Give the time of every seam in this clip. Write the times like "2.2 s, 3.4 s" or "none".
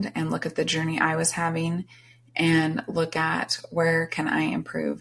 none